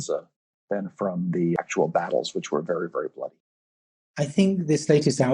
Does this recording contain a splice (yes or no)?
yes